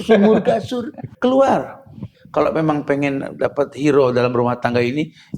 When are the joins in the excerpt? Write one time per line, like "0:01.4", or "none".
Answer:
0:01.0
0:02.2